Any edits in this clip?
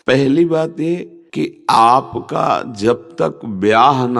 yes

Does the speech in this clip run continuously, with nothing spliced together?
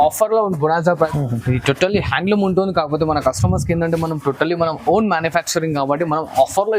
no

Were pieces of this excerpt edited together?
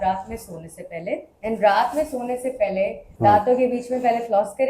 yes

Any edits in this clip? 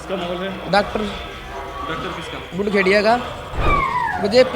yes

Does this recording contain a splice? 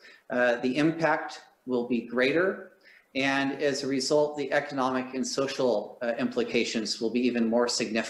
no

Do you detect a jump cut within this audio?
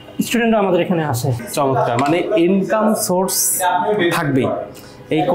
yes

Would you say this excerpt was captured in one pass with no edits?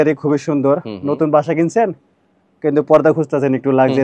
yes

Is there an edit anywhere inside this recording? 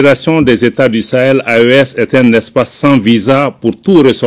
no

